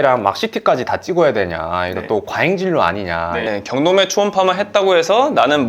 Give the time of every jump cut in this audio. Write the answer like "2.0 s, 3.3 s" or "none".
3.4 s